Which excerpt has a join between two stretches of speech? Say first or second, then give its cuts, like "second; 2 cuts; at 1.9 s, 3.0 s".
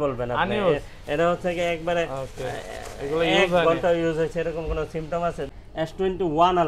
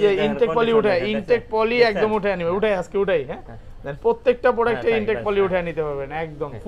first; 1 cut; at 5.5 s